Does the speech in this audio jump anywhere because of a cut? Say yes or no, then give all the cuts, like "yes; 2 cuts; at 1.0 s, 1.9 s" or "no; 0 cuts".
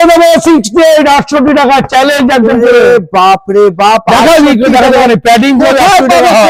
no; 0 cuts